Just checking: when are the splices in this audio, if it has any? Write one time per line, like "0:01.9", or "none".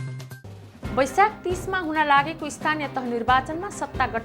none

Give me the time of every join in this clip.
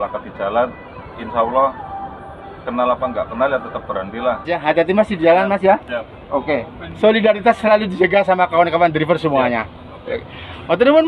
0:04.5

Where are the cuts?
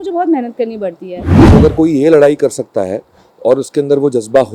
0:01.4

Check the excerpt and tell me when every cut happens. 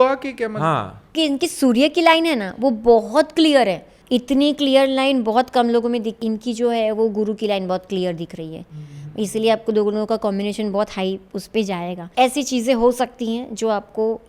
0:01.1
0:03.9
0:06.1
0:12.1

